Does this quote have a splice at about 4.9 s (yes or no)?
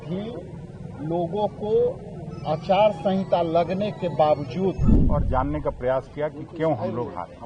yes